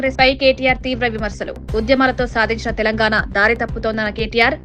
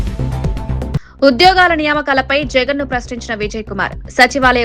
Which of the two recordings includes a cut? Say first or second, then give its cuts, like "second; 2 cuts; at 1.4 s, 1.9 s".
second; 1 cut; at 1.1 s